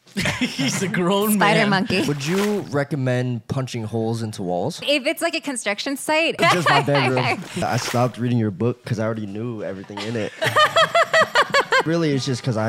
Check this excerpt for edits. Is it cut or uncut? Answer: cut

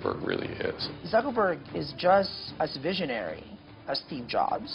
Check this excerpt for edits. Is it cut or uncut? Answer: cut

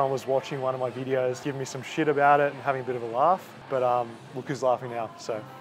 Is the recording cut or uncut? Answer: cut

